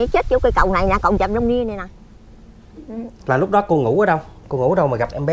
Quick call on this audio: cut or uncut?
cut